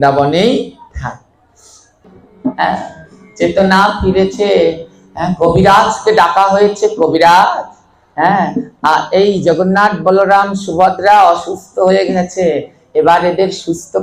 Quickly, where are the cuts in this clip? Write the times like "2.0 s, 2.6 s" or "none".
2.0 s